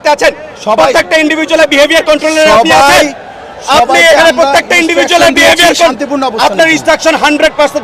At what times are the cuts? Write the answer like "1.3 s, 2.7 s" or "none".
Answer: none